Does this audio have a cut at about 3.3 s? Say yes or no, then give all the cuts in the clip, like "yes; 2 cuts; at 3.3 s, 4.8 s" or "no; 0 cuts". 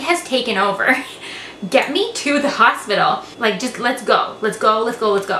yes; 1 cut; at 3.3 s